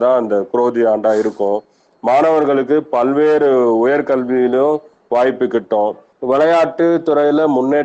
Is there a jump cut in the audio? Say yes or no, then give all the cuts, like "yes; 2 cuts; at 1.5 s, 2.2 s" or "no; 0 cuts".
yes; 2 cuts; at 1.7 s, 6.1 s